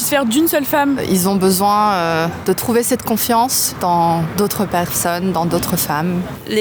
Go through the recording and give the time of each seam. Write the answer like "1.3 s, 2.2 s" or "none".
none